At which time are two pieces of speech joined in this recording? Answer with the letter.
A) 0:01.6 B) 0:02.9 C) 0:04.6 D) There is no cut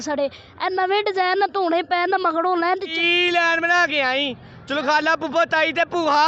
B